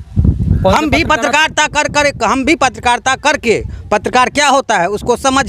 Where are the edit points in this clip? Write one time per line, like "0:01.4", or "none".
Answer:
none

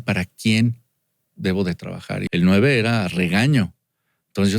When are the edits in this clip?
0:02.1

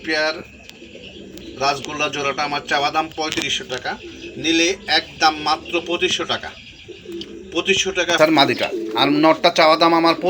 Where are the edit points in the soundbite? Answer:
0:08.2

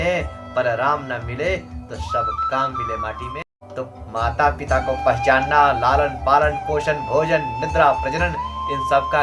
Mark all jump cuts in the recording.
0:03.4

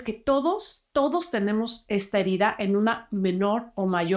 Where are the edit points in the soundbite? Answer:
none

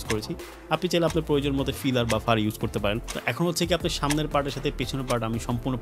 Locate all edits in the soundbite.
0:03.1

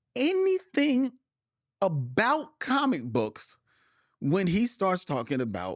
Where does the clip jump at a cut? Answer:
none

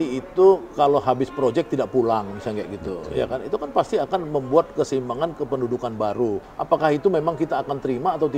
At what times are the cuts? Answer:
0:06.5

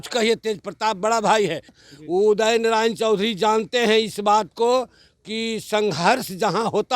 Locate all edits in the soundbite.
0:01.8

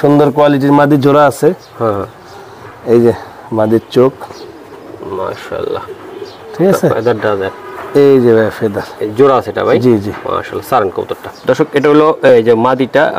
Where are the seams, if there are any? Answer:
none

